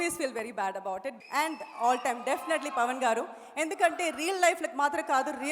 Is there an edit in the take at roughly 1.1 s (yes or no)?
yes